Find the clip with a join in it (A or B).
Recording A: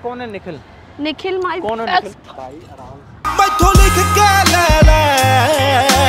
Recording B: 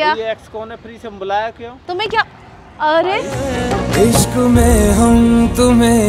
B